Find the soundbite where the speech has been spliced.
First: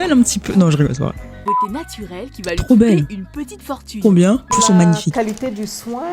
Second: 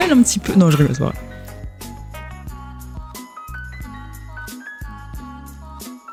first; 2 cuts; at 1.4 s, 4.5 s

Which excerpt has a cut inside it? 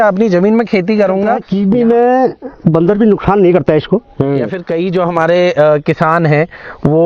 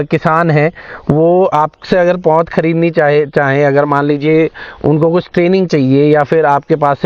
first; 2 cuts; at 1.5 s, 4.6 s

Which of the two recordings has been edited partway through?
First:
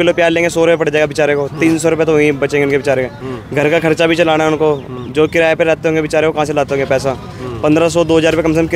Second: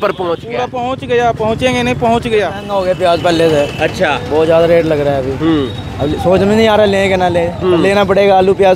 second; 1 cut; at 2.6 s

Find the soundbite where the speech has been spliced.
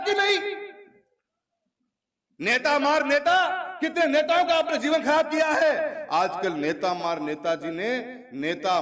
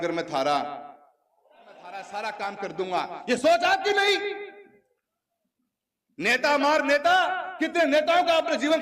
second; 1 cut; at 2.0 s

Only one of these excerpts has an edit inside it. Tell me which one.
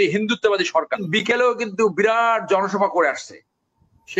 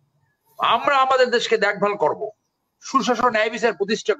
first; 1 cut; at 1.0 s

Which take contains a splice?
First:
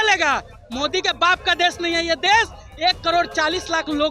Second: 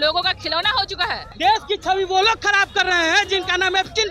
second; 1 cut; at 1.3 s

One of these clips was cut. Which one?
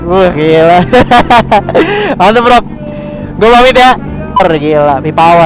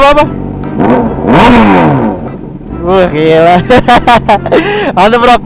first; 1 cut; at 4.4 s

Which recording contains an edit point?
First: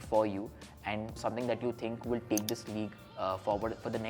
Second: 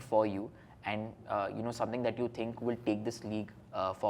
first; 1 cut; at 1.2 s

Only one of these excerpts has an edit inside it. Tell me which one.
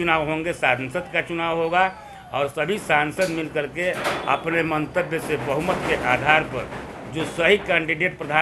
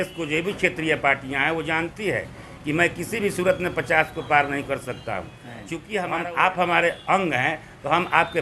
second; 1 cut; at 6.2 s

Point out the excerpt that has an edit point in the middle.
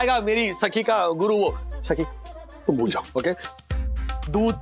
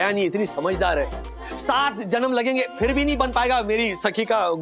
first; 1 cut; at 3.5 s

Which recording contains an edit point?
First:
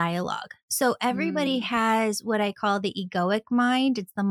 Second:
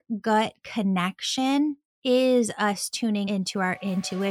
second; 1 cut; at 3.3 s

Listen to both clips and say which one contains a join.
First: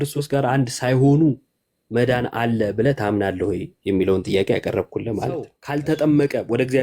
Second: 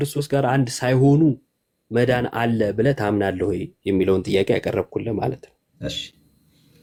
first; 1 cut; at 5.6 s

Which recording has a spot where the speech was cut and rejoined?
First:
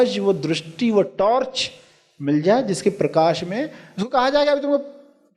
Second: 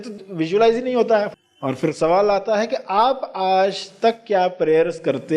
second; 1 cut; at 1.3 s

